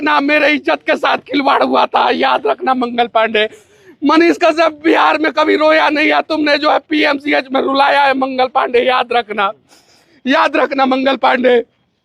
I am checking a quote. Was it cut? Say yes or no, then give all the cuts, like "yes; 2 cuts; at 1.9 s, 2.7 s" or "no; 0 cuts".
no; 0 cuts